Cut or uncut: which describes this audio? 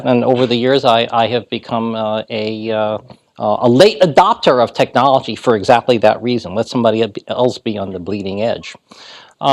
cut